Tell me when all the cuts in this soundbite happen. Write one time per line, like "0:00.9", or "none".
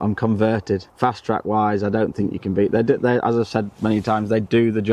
0:00.9